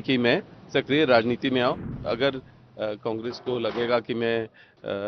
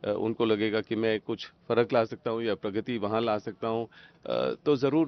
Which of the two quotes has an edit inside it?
first; 1 cut; at 1.8 s

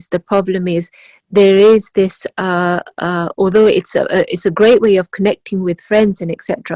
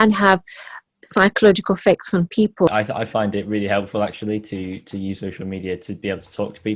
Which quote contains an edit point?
second; 1 cut; at 2.9 s

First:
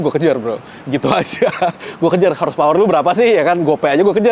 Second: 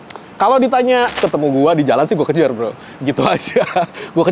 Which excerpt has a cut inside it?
second; 1 cut; at 1.2 s

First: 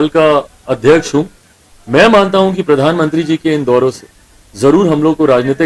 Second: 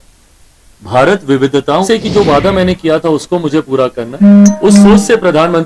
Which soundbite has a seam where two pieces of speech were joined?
second; 1 cut; at 1.9 s

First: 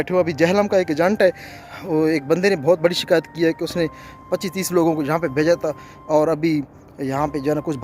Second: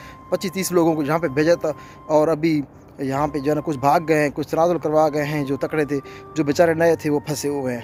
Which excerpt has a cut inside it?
first; 1 cut; at 1.5 s

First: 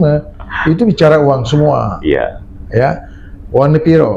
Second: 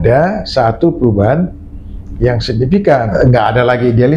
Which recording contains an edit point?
second; 1 cut; at 3.1 s

